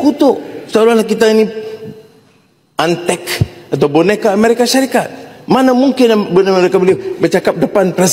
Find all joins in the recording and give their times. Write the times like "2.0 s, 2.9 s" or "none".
none

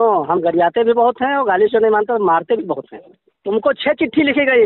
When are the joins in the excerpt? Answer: 3.1 s

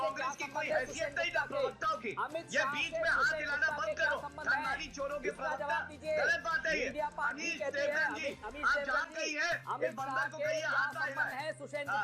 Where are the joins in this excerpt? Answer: none

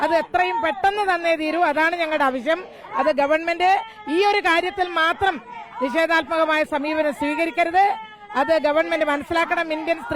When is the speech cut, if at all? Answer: none

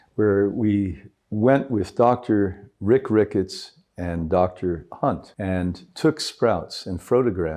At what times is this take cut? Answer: 5.3 s

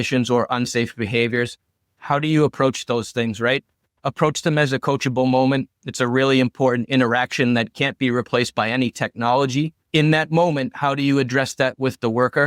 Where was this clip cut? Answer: 9.8 s

